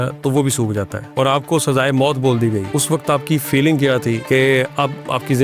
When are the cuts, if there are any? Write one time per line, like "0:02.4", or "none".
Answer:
0:01.0
0:02.7
0:04.2